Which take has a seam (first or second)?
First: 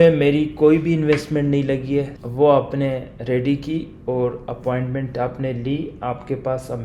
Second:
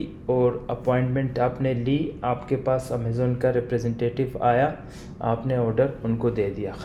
first